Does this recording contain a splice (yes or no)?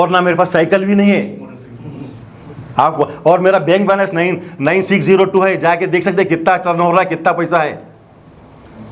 no